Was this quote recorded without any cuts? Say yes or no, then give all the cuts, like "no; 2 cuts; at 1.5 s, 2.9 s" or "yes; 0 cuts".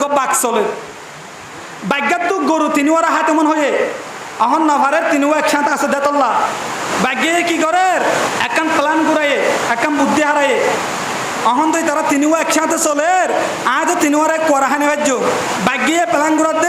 no; 3 cuts; at 6.8 s, 8.3 s, 15.5 s